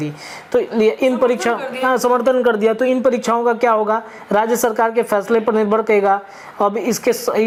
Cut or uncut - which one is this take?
uncut